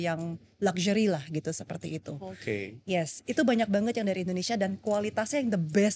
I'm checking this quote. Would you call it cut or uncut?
uncut